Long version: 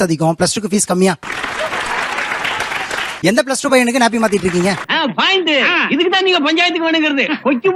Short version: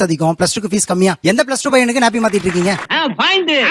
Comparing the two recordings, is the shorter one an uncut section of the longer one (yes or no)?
no